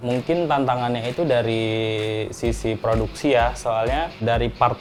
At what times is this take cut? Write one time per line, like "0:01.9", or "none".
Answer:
none